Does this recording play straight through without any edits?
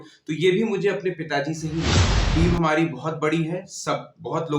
no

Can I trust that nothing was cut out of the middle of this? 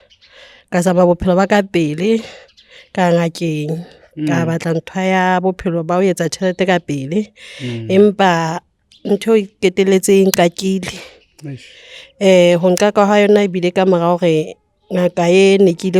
yes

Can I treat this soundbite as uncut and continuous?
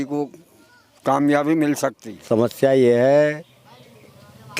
no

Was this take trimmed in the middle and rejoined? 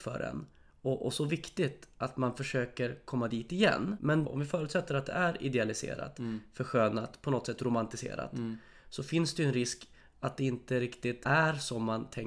yes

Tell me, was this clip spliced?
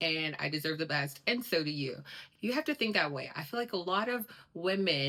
no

